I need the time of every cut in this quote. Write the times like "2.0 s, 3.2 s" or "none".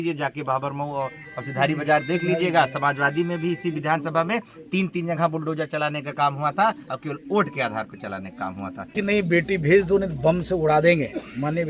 8.9 s